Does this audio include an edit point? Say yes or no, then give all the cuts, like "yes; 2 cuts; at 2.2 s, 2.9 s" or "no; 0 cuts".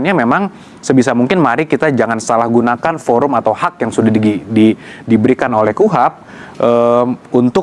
no; 0 cuts